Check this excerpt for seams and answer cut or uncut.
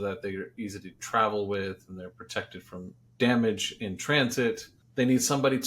cut